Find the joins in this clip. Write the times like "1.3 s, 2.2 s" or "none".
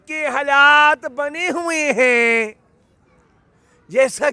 none